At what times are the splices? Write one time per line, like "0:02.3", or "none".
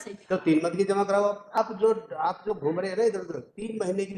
0:01.6